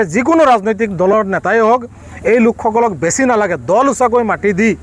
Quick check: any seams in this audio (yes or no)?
no